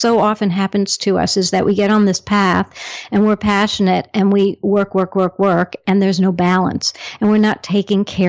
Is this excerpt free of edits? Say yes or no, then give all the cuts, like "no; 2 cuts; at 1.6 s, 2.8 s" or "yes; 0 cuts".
yes; 0 cuts